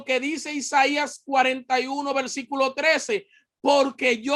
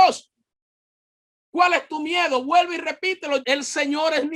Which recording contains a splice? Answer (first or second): second